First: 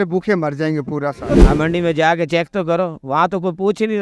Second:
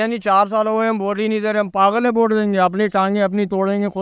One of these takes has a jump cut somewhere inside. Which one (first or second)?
first